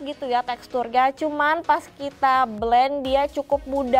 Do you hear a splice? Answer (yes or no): no